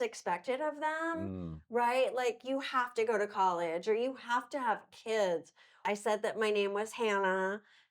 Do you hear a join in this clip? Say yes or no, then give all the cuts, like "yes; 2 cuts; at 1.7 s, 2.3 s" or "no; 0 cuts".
yes; 1 cut; at 5.8 s